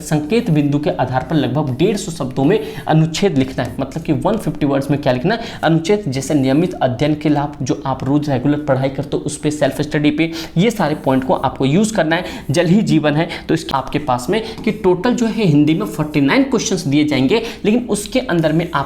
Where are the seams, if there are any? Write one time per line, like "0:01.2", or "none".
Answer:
0:13.7